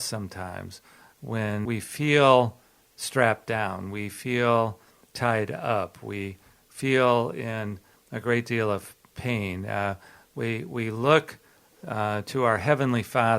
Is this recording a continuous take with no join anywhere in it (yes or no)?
no